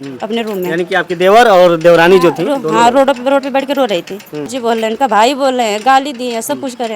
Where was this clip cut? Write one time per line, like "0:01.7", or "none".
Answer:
0:04.5